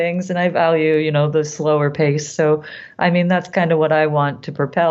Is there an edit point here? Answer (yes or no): no